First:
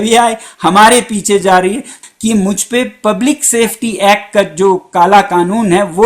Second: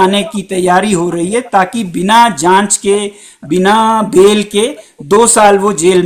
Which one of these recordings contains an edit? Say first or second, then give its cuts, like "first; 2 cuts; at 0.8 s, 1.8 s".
first; 1 cut; at 2.0 s